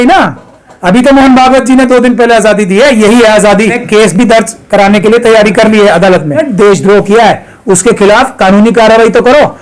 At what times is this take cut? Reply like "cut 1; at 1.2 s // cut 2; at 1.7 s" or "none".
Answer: cut 1; at 3.8 s // cut 2; at 6.4 s